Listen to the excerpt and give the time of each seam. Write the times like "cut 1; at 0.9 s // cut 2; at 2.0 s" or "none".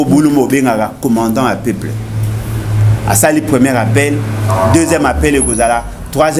none